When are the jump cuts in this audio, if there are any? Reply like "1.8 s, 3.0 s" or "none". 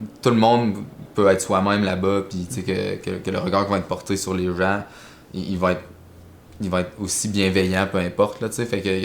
none